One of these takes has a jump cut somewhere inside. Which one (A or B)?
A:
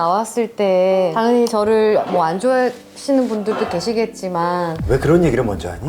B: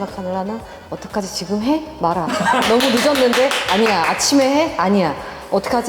A